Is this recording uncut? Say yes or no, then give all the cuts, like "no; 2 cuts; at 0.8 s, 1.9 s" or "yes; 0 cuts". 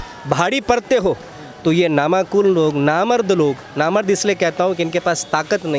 yes; 0 cuts